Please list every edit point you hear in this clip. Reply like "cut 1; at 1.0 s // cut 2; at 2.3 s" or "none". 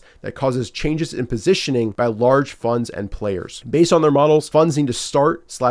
cut 1; at 1.9 s // cut 2; at 3.5 s // cut 3; at 4.5 s